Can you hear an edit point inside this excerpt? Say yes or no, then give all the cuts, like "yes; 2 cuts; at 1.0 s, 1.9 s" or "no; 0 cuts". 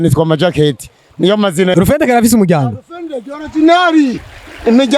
yes; 1 cut; at 1.7 s